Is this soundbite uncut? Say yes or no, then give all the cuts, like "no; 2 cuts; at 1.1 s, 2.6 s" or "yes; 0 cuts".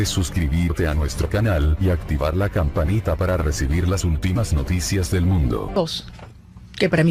no; 1 cut; at 5.7 s